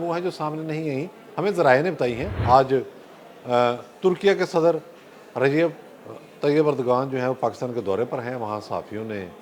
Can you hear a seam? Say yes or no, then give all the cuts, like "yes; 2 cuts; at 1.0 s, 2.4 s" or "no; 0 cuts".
yes; 1 cut; at 2.3 s